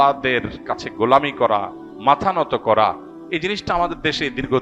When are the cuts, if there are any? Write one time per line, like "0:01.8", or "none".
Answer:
0:03.1